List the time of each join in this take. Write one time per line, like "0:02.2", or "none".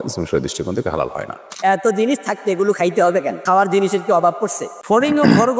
0:01.5
0:03.4
0:04.7